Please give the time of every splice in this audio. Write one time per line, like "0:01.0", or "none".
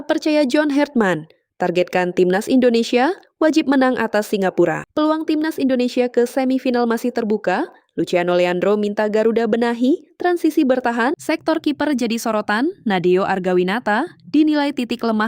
0:04.8
0:11.2